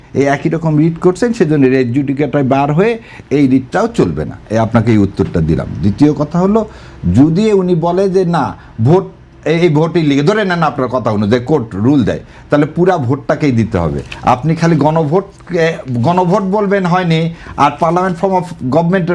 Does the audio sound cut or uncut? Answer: uncut